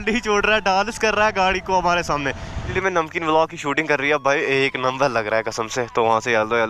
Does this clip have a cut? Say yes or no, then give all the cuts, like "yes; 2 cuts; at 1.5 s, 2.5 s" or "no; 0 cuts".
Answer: yes; 1 cut; at 2.7 s